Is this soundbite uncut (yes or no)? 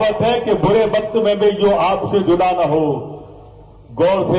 yes